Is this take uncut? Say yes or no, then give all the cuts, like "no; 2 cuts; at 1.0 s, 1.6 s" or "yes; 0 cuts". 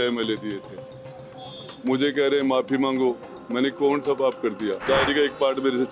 no; 1 cut; at 4.8 s